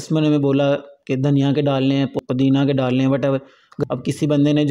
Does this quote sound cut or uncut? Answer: cut